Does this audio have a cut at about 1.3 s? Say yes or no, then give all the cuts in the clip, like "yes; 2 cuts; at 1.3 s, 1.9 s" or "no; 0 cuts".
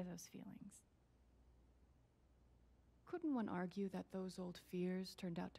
yes; 2 cuts; at 1.3 s, 3.0 s